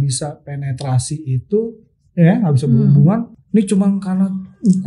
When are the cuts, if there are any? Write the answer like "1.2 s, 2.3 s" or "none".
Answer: 3.4 s

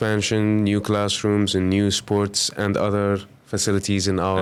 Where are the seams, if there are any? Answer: none

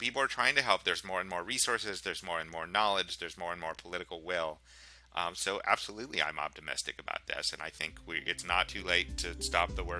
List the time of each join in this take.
none

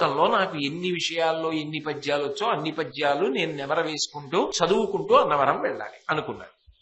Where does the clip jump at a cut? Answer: 4.5 s

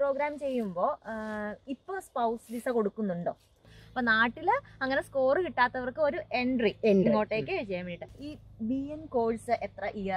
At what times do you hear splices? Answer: 3.8 s, 8.2 s

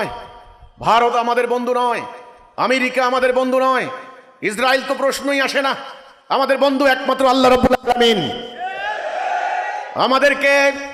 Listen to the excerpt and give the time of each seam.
none

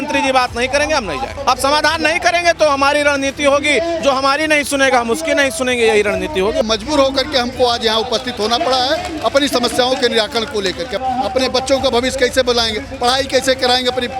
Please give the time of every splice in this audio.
1.3 s, 6.6 s, 11.0 s

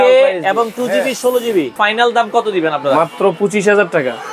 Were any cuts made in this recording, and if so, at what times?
1.7 s

